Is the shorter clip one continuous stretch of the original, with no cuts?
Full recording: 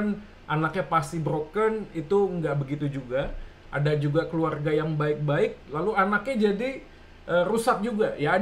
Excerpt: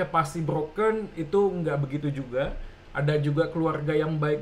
yes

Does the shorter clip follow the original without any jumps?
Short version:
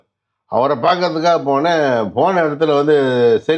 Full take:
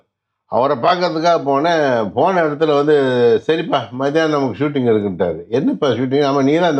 yes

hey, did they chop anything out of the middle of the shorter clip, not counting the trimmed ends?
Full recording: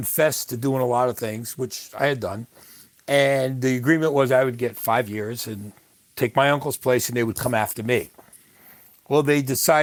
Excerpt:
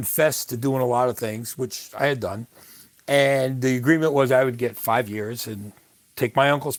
no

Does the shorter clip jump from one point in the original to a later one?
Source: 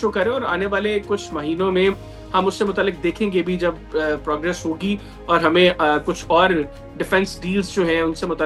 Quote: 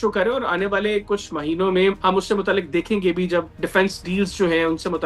yes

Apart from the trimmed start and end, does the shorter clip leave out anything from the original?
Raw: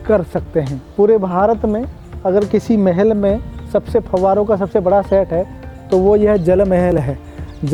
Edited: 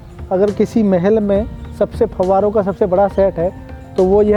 no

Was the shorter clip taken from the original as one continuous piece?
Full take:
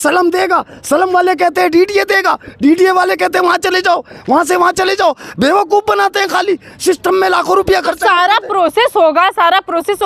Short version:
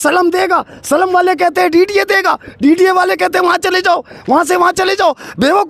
yes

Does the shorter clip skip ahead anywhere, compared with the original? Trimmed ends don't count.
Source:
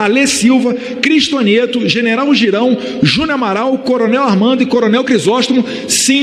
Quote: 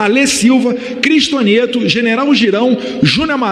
no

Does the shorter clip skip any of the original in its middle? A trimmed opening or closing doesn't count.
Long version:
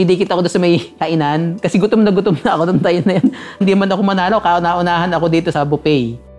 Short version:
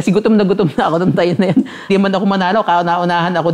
yes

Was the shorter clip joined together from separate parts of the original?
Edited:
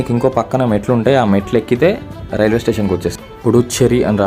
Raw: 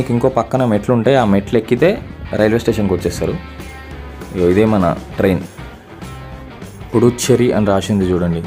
yes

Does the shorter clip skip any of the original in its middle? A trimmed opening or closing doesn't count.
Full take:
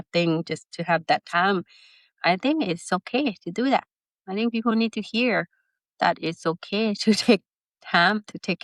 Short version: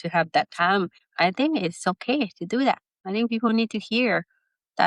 yes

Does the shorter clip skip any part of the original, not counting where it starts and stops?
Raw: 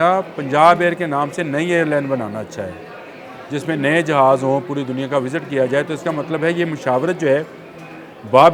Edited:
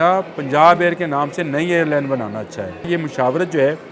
yes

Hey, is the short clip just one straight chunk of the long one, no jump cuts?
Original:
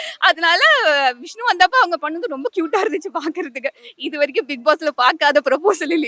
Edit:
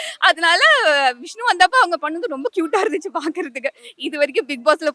yes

